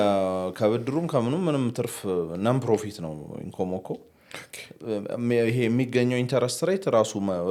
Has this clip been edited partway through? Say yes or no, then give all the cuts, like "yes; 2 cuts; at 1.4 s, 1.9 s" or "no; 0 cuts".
no; 0 cuts